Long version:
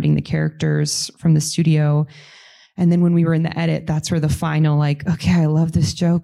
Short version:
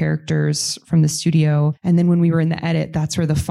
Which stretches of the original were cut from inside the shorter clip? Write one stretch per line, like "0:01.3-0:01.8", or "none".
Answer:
0:02.1-0:02.7